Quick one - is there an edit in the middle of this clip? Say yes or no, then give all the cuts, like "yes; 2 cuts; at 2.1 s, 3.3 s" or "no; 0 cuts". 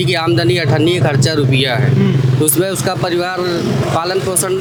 no; 0 cuts